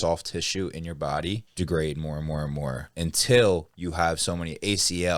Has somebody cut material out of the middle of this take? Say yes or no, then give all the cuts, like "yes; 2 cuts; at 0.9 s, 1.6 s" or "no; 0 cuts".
yes; 2 cuts; at 1.5 s, 2.9 s